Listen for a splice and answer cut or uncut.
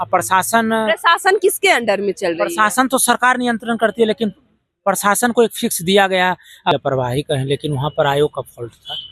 cut